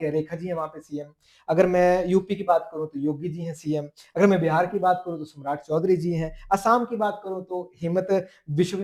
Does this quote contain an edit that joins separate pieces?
no; 0 cuts

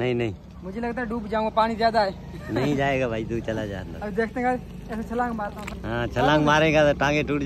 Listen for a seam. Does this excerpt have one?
yes; 1 cut; at 5.6 s

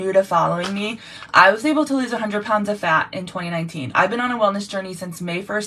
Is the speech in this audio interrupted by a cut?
no; 0 cuts

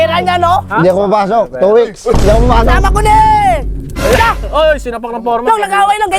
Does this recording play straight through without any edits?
yes; 0 cuts

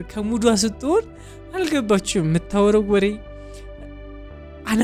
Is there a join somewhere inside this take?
no; 0 cuts

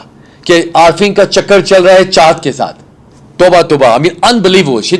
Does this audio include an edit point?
no; 0 cuts

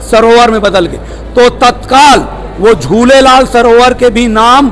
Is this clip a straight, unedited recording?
yes; 0 cuts

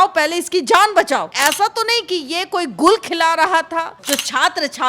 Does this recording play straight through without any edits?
no; 2 cuts; at 1.3 s, 4.0 s

